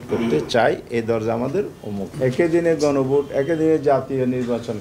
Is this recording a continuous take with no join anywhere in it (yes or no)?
no